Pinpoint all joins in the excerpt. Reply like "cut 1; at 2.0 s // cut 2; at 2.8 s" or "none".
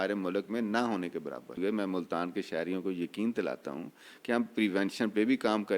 cut 1; at 1.6 s